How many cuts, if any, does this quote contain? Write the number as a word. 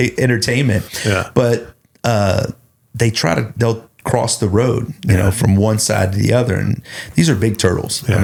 zero